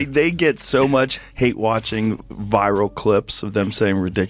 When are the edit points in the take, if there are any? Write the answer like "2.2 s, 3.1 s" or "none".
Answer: 1.2 s